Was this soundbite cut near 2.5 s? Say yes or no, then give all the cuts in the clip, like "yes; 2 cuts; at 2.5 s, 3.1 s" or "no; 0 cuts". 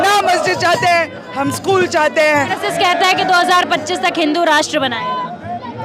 yes; 1 cut; at 2.5 s